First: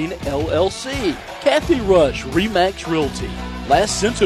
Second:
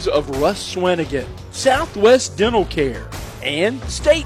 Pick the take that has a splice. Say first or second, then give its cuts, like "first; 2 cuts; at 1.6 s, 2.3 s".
first; 1 cut; at 1.3 s